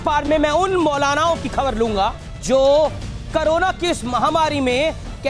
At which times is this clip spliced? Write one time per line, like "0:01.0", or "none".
0:02.4